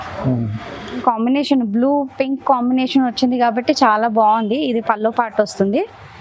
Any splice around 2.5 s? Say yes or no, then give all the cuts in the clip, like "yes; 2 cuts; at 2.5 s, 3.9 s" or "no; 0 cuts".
no; 1 cut; at 1.0 s